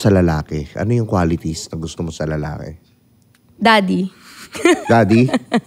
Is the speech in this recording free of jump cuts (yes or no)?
yes